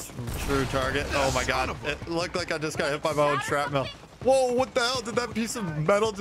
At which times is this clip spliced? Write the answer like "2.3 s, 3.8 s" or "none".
none